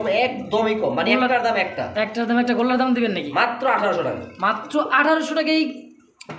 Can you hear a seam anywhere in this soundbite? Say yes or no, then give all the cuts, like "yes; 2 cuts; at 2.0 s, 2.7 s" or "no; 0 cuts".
no; 0 cuts